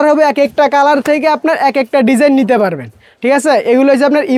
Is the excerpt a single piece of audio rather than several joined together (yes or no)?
yes